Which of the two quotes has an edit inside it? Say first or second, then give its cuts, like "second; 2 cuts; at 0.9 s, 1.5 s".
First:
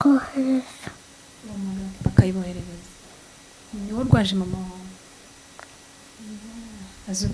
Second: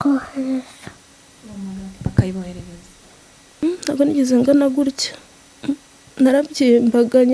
second; 1 cut; at 3.6 s